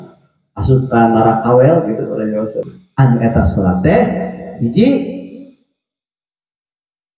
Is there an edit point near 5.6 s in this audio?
no; 1 cut; at 2.7 s

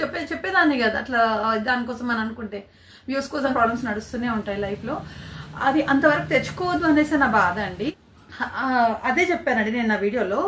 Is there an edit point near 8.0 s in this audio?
yes; 2 cuts; at 3.5 s, 8.0 s

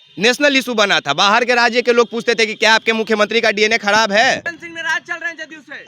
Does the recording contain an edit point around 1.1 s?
no; 1 cut; at 4.4 s

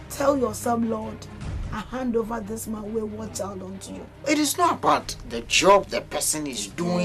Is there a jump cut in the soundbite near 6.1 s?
no; 1 cut; at 4.0 s

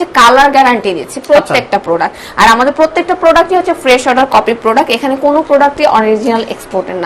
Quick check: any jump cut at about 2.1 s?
no; 0 cuts

